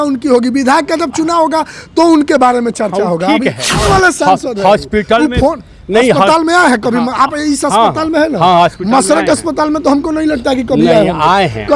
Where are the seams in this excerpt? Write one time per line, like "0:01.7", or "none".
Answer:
0:03.7